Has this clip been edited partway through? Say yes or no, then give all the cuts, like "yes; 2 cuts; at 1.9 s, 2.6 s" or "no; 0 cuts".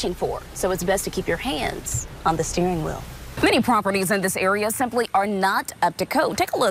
yes; 1 cut; at 3.4 s